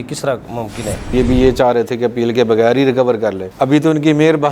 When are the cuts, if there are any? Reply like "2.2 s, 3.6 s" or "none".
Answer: 1.1 s